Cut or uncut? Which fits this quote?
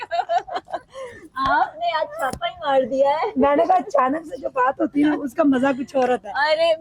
uncut